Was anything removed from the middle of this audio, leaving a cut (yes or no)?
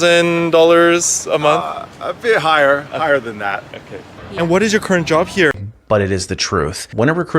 yes